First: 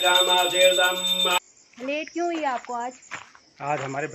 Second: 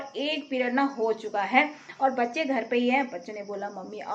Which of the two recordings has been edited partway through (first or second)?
first